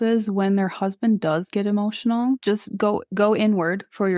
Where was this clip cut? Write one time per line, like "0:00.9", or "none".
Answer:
0:02.4